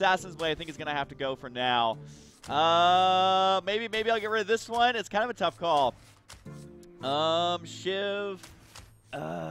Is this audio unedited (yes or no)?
no